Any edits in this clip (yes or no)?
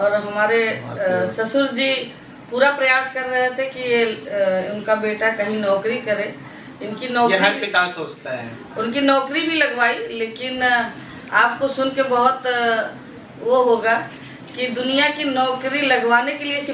no